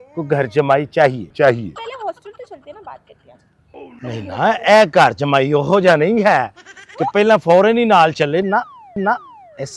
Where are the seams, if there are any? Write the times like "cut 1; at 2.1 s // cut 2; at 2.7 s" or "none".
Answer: cut 1; at 1.8 s